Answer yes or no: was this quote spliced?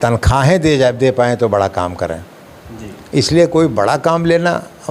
no